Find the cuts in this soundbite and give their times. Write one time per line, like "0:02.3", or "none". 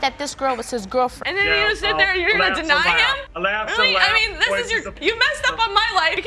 0:01.2